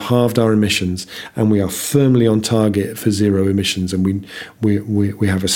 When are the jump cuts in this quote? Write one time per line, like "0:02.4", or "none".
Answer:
none